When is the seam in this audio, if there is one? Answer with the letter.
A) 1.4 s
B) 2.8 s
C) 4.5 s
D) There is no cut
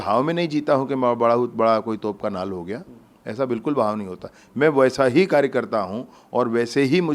D